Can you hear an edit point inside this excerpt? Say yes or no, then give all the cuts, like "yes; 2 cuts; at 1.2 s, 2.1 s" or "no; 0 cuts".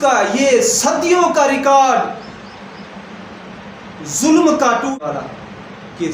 yes; 1 cut; at 4.9 s